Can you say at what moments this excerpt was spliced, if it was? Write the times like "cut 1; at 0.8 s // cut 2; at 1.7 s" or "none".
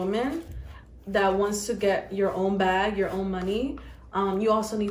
none